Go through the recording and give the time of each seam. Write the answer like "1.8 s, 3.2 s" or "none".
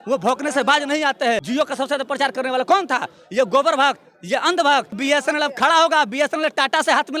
1.4 s, 5.0 s